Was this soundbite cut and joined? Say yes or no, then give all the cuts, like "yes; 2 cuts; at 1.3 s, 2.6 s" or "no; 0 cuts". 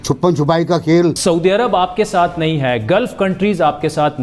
yes; 1 cut; at 1.2 s